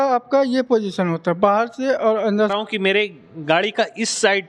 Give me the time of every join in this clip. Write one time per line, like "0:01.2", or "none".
0:02.5